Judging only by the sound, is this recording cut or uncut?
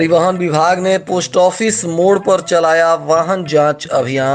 uncut